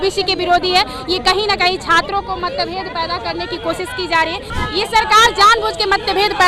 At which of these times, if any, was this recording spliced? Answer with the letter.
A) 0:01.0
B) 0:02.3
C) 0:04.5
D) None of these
C